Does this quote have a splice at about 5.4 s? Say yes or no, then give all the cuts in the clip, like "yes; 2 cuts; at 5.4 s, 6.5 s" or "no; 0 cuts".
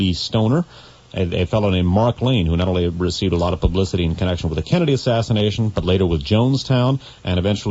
no; 1 cut; at 2.2 s